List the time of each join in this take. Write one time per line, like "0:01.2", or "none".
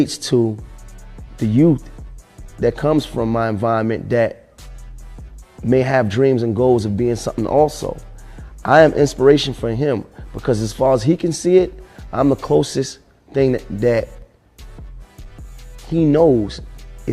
0:04.0

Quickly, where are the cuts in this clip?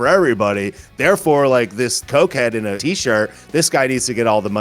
0:02.0
0:02.8

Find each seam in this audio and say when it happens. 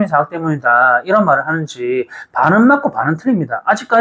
none

